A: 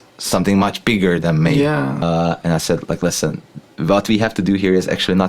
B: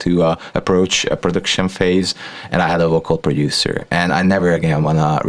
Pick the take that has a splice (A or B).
A